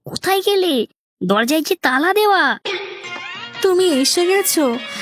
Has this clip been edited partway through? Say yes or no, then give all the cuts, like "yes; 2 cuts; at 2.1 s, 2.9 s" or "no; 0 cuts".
no; 0 cuts